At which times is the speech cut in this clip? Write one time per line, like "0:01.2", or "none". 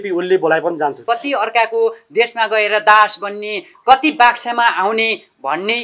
0:01.0